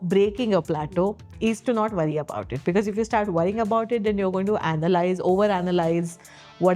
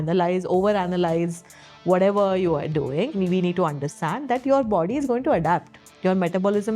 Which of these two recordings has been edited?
second; 1 cut; at 3.1 s

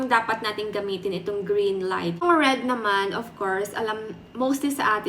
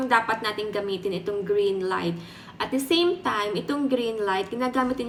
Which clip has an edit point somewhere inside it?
first; 1 cut; at 2.2 s

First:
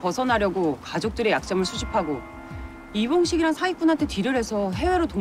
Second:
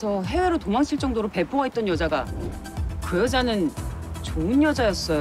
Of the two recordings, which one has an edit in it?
second; 1 cut; at 2.3 s

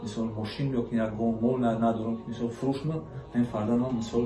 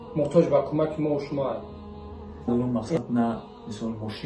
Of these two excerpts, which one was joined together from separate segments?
second; 1 cut; at 2.5 s

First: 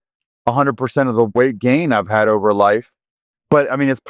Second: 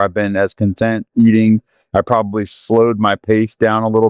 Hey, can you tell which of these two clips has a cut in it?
first; 2 cuts; at 1.3 s, 3.0 s

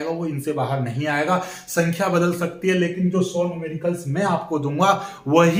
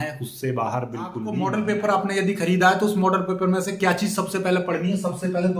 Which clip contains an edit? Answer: second; 1 cut; at 1.3 s

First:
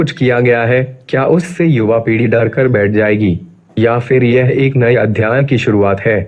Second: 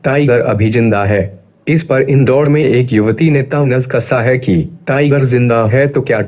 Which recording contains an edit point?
second; 1 cut; at 4.7 s

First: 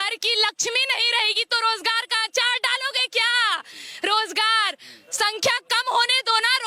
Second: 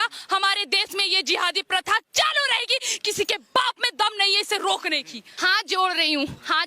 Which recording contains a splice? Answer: second; 1 cut; at 5.2 s

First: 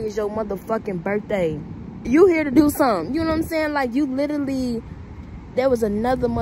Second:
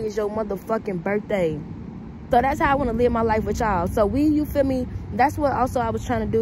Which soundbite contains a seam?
first; 1 cut; at 1.9 s

